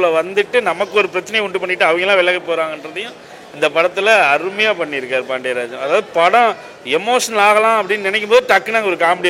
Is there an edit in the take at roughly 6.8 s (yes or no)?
no